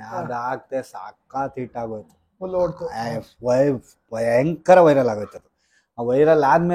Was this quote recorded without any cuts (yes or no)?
yes